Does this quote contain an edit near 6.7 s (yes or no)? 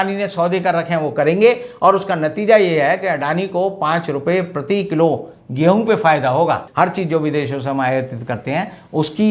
yes